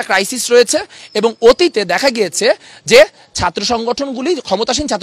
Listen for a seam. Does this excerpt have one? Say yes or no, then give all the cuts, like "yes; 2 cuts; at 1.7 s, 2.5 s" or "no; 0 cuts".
no; 0 cuts